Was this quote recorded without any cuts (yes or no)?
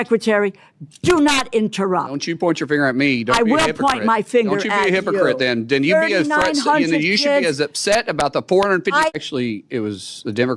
no